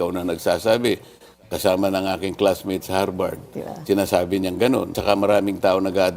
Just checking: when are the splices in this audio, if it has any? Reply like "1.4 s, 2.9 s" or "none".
5.0 s